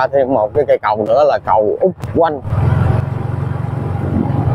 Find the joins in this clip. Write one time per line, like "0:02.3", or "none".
none